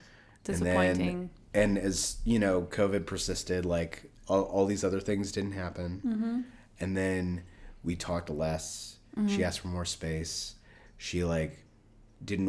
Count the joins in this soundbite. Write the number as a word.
zero